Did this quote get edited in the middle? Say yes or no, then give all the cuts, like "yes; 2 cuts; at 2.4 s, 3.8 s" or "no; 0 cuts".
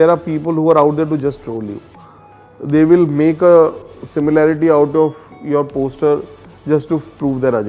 no; 0 cuts